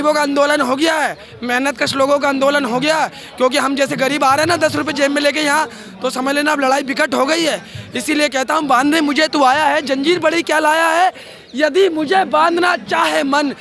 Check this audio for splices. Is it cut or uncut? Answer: uncut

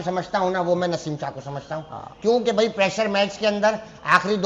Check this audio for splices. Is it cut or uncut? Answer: uncut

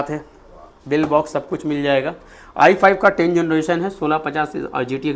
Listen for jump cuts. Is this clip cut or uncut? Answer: uncut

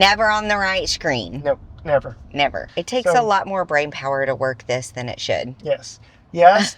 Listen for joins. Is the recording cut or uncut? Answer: cut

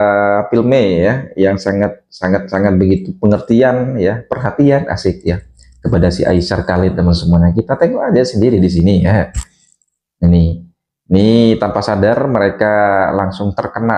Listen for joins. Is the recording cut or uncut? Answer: uncut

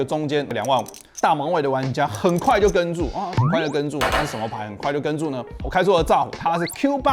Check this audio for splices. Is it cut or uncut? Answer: uncut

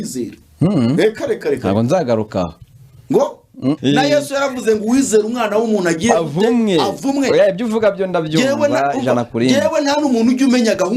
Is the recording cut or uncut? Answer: cut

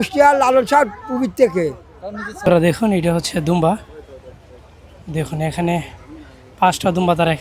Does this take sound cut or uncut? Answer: cut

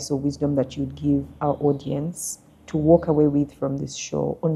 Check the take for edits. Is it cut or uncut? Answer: uncut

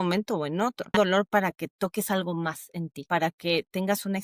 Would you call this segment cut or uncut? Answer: cut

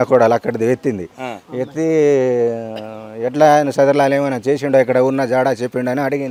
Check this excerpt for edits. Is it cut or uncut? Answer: uncut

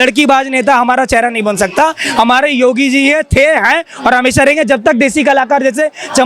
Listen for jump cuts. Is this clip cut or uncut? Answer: uncut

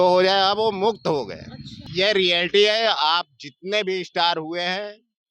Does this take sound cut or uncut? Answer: cut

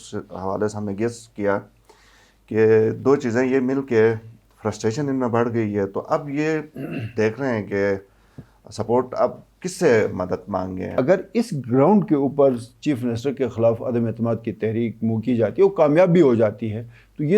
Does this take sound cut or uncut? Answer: cut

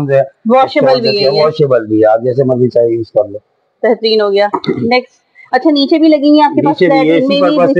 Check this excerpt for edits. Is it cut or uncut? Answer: uncut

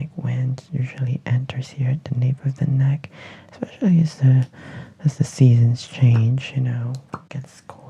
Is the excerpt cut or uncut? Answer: uncut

